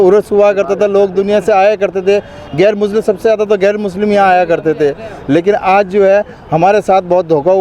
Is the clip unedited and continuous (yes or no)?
yes